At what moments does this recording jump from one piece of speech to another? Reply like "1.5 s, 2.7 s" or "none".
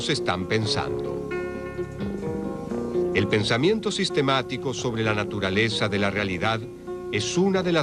6.5 s